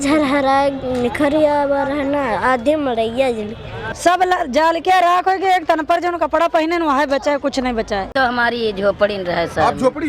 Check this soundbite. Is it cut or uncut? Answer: cut